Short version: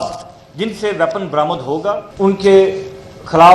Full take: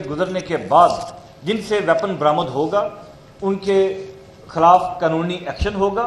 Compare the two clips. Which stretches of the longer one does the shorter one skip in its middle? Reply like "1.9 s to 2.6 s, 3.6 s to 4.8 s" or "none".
2.9 s to 3.3 s